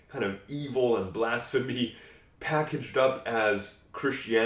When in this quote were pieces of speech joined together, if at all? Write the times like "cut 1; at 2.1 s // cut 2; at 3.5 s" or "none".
none